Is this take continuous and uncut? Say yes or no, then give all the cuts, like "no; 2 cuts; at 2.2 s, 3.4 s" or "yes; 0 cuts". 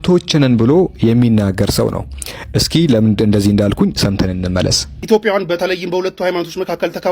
no; 1 cut; at 4.9 s